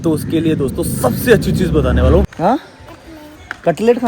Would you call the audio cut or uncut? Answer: cut